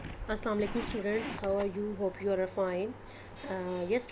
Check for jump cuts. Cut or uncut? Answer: uncut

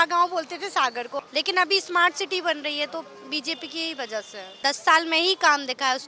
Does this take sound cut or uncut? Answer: cut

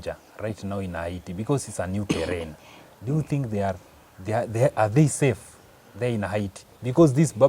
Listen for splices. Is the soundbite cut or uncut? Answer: uncut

